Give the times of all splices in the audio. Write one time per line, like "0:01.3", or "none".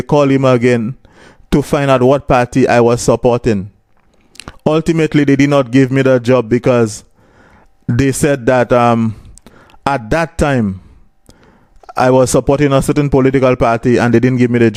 none